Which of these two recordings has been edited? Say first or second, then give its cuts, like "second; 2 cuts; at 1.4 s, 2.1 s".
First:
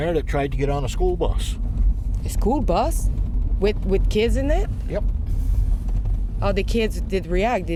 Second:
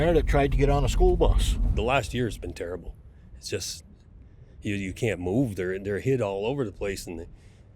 second; 1 cut; at 1.8 s